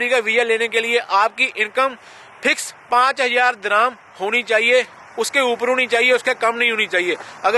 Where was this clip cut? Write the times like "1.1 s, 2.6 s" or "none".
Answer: none